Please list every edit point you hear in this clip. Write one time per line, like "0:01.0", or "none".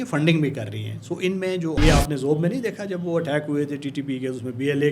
0:01.8